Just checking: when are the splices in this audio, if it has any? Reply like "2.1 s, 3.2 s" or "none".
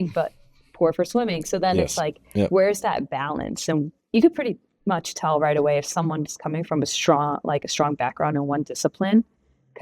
4.0 s